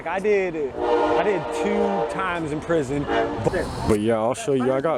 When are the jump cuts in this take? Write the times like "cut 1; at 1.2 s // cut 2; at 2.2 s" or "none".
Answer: cut 1; at 3.5 s